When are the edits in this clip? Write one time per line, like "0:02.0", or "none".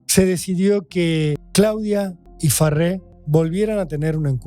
0:01.4
0:02.2
0:03.1